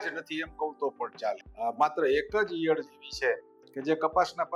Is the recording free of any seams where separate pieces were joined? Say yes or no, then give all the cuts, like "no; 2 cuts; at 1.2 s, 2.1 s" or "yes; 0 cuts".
no; 1 cut; at 1.5 s